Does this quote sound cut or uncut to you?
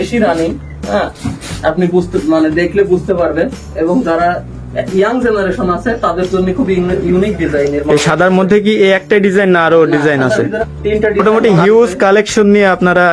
cut